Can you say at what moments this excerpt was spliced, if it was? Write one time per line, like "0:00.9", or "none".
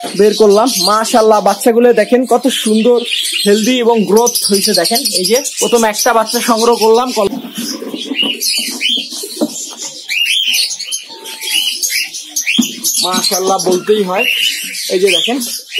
0:07.3